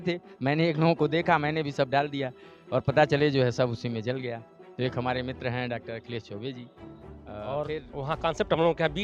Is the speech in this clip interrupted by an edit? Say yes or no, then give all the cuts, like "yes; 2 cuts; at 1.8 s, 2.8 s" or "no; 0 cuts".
yes; 1 cut; at 7.4 s